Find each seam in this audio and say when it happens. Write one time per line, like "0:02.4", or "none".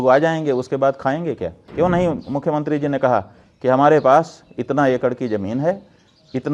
0:01.6